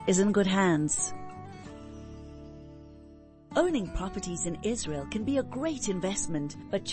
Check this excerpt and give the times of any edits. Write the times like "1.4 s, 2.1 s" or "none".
0.9 s, 3.4 s